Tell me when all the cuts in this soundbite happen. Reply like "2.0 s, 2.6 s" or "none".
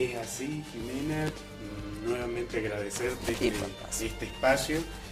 1.5 s